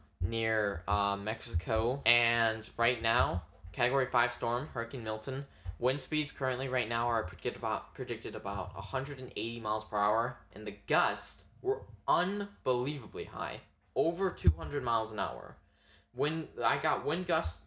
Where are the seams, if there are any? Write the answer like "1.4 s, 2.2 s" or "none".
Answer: 2.0 s, 10.5 s